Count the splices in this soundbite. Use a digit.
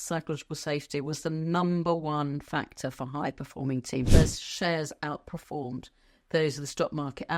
1